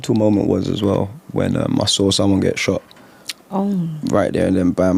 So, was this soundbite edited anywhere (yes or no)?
no